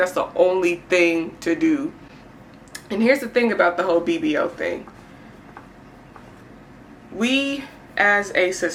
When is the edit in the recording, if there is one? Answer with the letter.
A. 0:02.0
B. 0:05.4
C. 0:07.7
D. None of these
D